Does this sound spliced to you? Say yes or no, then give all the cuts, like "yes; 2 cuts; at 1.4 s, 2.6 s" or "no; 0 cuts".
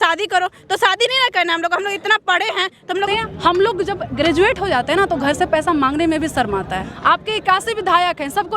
yes; 2 cuts; at 3.1 s, 6.9 s